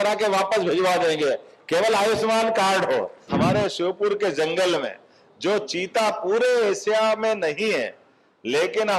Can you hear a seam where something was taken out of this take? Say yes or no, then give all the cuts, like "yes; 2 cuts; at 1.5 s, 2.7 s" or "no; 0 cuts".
yes; 1 cut; at 3.3 s